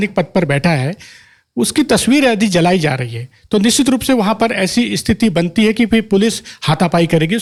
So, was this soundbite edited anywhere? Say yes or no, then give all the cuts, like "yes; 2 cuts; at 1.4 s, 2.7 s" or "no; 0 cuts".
no; 0 cuts